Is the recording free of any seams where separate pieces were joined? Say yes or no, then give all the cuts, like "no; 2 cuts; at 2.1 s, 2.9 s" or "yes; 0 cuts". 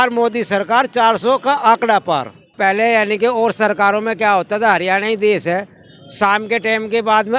no; 1 cut; at 2.6 s